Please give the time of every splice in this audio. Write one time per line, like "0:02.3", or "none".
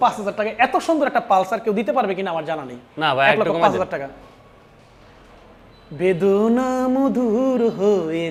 none